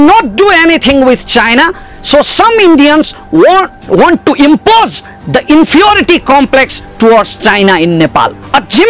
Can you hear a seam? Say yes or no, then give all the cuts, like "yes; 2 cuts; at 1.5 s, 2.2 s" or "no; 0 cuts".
no; 0 cuts